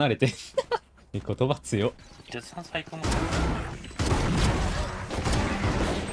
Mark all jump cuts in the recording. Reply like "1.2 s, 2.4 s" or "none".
2.1 s, 3.8 s, 5.1 s